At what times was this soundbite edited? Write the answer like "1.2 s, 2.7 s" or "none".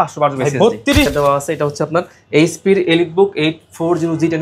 1.1 s